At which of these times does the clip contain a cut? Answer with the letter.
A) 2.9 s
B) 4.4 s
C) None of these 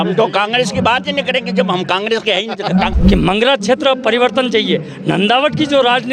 A